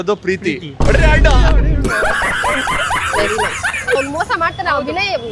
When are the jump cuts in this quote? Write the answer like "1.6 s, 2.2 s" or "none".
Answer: 4.0 s